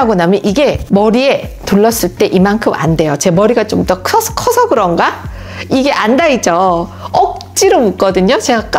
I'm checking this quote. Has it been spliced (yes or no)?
no